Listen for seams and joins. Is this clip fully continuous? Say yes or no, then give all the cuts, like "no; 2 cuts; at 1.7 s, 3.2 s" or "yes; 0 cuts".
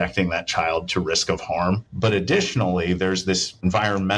no; 1 cut; at 1.8 s